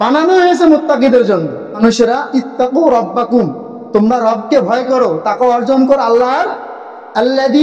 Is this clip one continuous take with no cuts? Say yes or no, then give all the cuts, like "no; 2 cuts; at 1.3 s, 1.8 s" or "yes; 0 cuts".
no; 1 cut; at 1.8 s